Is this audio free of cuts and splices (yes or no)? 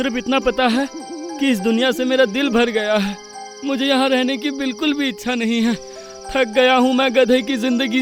yes